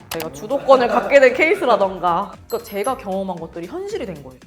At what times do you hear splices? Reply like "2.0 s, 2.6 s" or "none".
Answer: 2.4 s